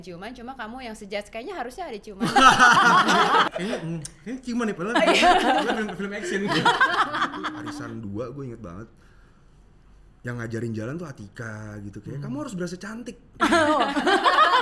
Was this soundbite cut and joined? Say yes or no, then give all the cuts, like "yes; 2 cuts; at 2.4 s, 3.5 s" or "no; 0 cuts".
yes; 2 cuts; at 3.4 s, 7.5 s